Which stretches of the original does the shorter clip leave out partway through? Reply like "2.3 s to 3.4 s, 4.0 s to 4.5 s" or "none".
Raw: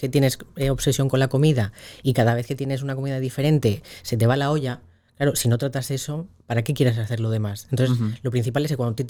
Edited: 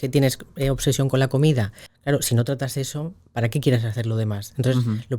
1.8 s to 5.0 s